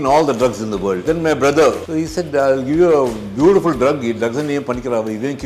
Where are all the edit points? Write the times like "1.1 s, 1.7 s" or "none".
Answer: 1.0 s, 1.8 s